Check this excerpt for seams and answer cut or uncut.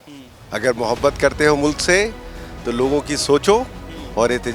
uncut